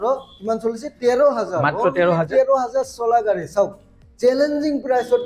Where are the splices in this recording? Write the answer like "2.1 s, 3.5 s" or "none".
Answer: none